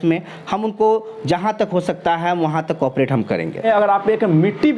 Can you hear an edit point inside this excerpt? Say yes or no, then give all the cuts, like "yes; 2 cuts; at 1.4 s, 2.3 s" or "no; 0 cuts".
yes; 1 cut; at 3.6 s